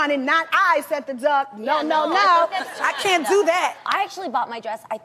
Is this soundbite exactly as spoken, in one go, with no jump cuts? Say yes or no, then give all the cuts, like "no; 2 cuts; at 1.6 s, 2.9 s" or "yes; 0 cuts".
no; 1 cut; at 1.2 s